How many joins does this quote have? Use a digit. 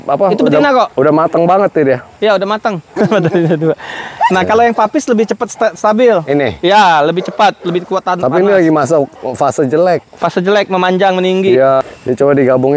2